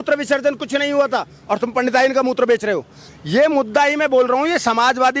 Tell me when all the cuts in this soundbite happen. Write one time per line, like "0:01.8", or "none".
0:03.0